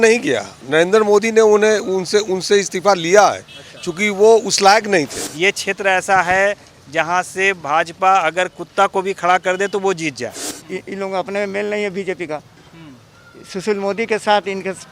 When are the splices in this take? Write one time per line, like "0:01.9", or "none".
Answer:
0:05.2
0:10.5